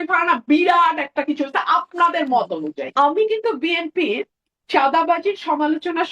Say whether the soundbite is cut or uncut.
cut